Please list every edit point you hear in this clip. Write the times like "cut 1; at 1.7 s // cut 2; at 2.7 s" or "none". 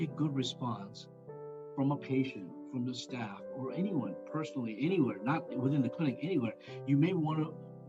none